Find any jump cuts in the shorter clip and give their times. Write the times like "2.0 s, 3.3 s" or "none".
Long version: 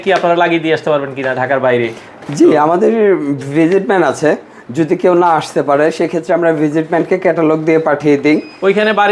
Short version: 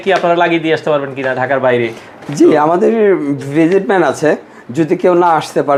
none